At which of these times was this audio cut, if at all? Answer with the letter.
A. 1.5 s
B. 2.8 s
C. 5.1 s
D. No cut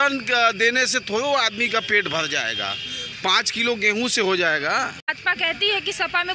C